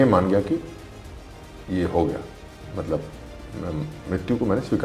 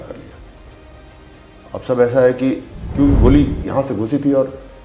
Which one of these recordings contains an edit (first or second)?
second